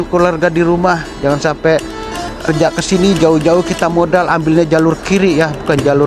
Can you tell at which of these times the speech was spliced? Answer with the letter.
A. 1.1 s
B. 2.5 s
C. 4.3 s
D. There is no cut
B